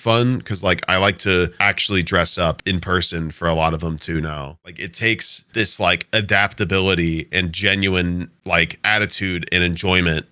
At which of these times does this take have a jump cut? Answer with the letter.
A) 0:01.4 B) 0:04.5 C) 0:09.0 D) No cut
B